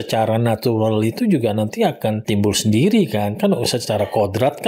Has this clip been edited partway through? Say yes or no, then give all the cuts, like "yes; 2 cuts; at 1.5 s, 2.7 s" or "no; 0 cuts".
yes; 1 cut; at 2.2 s